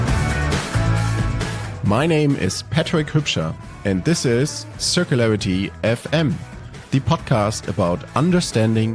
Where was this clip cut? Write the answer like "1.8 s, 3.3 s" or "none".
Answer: 1.1 s